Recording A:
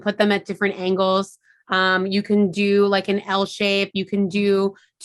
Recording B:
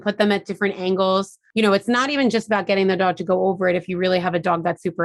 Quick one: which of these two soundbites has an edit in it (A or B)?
B